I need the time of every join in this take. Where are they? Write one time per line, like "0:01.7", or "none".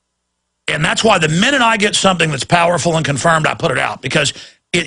0:02.6